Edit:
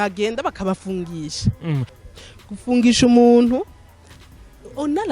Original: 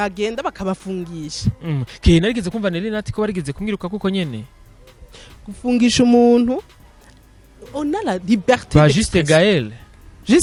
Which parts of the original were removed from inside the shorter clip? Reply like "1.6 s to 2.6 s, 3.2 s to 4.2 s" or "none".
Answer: 1.9 s to 4.9 s